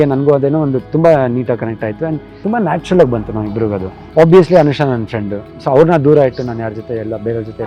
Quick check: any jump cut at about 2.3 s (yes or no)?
yes